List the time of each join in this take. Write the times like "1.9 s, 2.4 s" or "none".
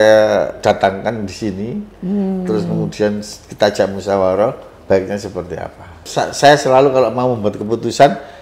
6.1 s